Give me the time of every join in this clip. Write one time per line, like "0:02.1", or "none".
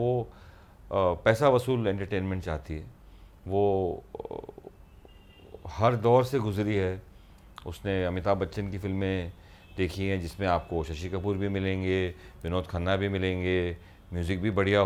none